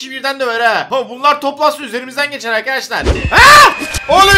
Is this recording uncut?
no; 2 cuts; at 0.9 s, 3.2 s

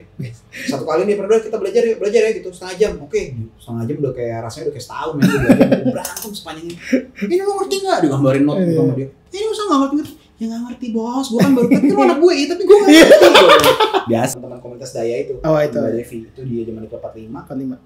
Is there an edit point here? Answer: yes; 1 cut; at 14.3 s

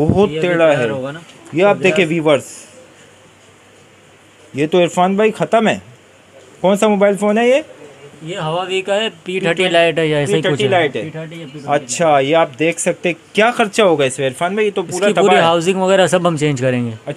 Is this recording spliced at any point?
no; 0 cuts

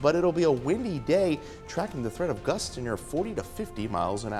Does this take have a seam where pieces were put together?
no; 0 cuts

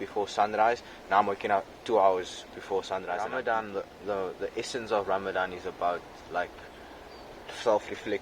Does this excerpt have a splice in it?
yes; 1 cut; at 3.2 s

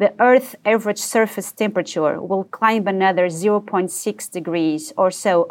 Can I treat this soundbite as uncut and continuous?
yes; 0 cuts

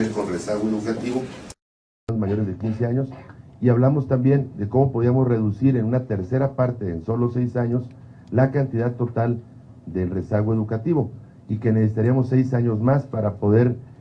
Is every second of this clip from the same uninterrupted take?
no; 1 cut; at 9.2 s

